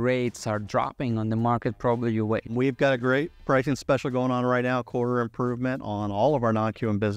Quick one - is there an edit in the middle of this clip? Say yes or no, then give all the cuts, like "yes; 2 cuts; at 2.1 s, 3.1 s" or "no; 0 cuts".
yes; 1 cut; at 2.5 s